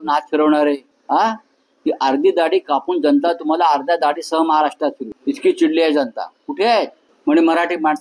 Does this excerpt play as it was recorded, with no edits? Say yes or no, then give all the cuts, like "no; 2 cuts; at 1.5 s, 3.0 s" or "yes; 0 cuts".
no; 3 cuts; at 0.9 s, 5.1 s, 7.0 s